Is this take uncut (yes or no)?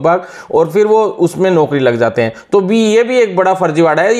yes